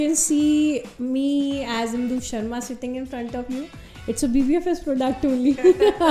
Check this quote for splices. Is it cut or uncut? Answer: uncut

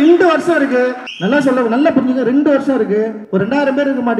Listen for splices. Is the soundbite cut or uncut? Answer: cut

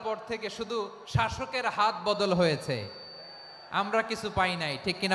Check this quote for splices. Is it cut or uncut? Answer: uncut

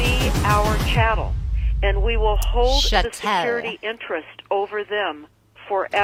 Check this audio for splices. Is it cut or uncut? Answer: uncut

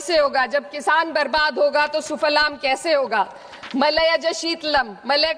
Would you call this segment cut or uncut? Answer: uncut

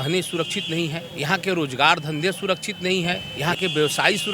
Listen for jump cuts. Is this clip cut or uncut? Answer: cut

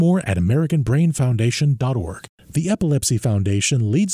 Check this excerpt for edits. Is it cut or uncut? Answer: cut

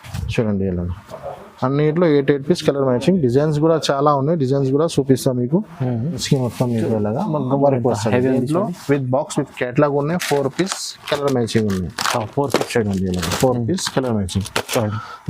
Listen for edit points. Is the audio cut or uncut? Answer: cut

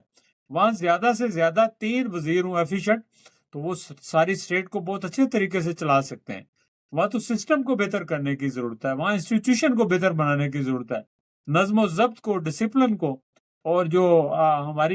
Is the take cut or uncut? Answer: uncut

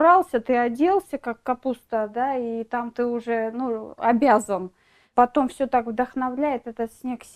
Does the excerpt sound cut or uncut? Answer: cut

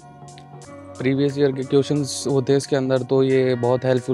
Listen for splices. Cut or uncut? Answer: uncut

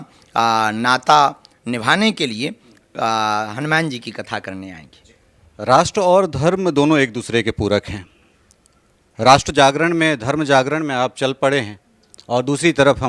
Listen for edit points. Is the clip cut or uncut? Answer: uncut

